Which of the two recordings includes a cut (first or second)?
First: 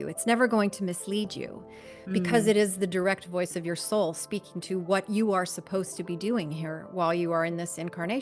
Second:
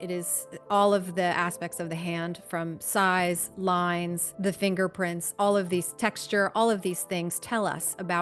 second